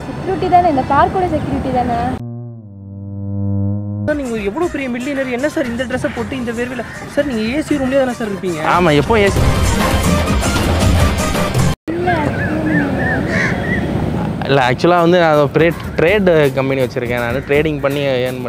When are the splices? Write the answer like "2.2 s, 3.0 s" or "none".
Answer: 4.1 s, 11.8 s

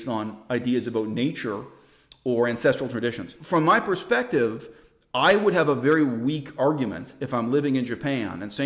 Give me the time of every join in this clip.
3.3 s

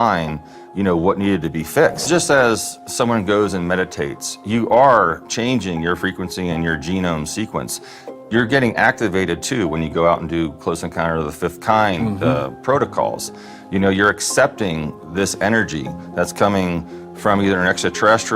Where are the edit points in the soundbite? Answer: 2.1 s

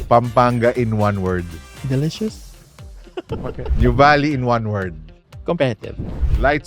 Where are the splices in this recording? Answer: 3.7 s

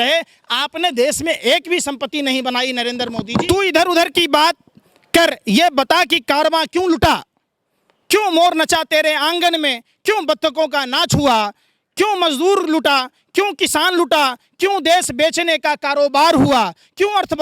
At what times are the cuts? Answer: 3.2 s

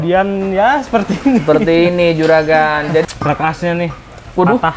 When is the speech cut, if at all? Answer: 3.0 s

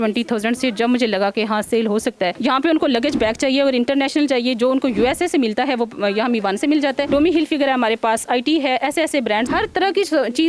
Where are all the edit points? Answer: 2.4 s, 7.0 s

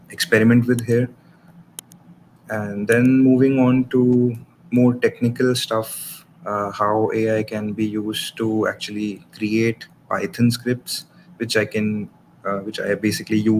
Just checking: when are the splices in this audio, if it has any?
none

